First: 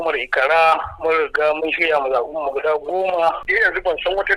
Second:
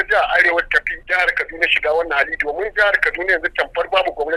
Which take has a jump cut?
first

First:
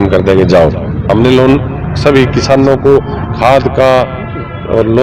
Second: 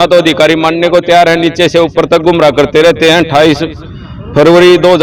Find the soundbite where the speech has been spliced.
first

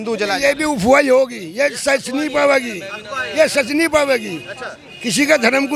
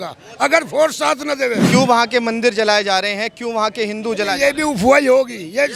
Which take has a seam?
second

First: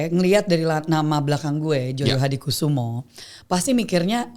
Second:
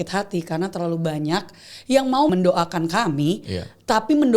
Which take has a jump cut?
second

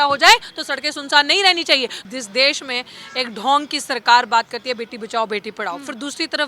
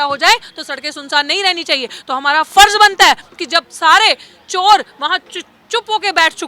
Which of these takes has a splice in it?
first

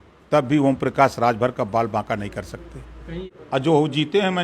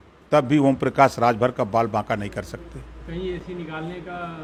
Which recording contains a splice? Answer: first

